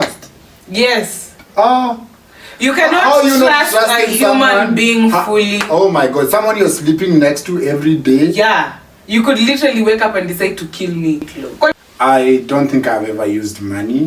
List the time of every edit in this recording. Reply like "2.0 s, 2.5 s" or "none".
11.7 s